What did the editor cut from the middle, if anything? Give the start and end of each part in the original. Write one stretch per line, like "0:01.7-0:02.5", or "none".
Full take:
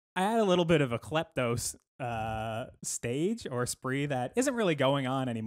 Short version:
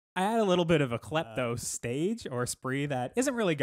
0:01.7-0:02.9